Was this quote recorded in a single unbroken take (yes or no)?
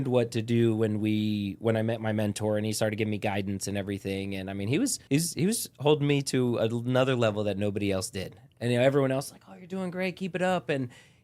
no